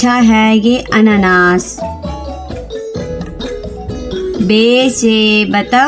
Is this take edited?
yes; 2 cuts; at 2.3 s, 4.4 s

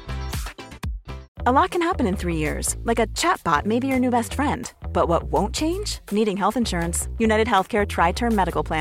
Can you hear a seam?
yes; 1 cut; at 1.2 s

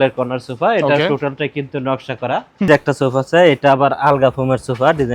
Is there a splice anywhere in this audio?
yes; 1 cut; at 2.7 s

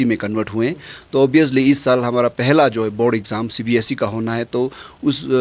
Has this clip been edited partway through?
no; 0 cuts

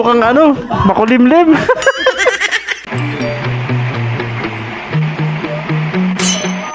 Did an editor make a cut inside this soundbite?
yes; 1 cut; at 2.9 s

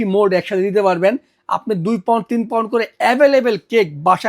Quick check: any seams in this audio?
no; 0 cuts

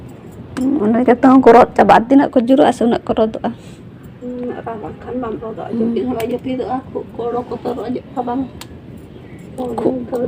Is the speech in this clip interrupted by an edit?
no; 0 cuts

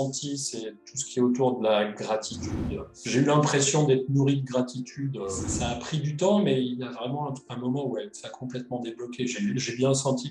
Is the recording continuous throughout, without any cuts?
no; 2 cuts; at 2.9 s, 5.5 s

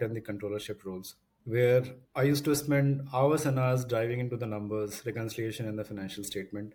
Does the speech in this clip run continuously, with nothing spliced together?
yes; 0 cuts

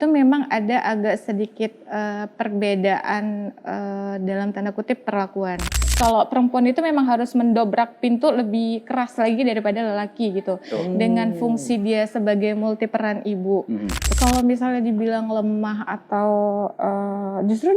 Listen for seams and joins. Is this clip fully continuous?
no; 2 cuts; at 5.9 s, 14.1 s

